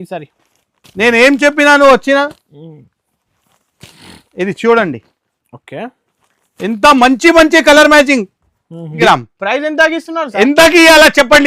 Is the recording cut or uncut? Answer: cut